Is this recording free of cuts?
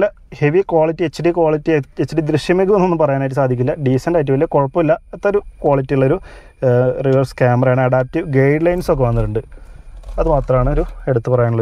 yes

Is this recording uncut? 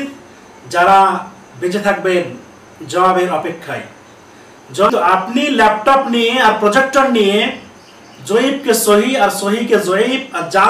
no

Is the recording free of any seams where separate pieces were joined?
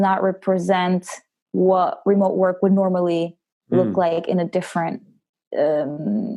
yes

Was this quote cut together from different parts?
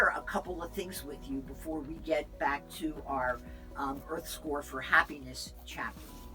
no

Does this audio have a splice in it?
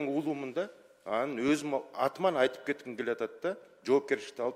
no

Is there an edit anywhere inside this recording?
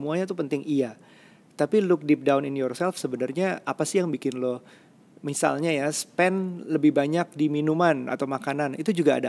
no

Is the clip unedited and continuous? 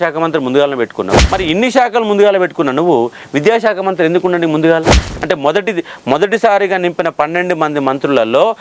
no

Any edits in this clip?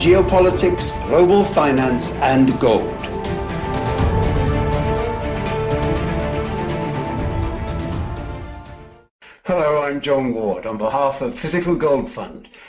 no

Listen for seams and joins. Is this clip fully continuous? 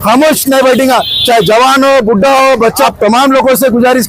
no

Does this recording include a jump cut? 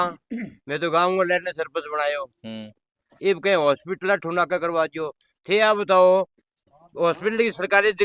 no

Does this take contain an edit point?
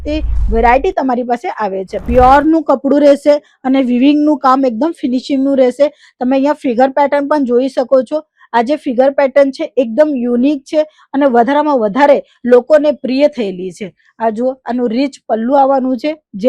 yes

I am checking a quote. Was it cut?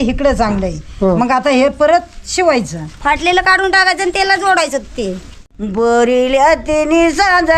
yes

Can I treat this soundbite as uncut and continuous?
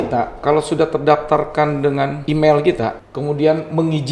no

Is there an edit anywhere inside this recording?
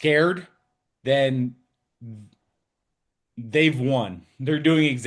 no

